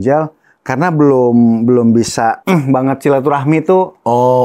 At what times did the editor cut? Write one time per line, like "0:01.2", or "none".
0:02.4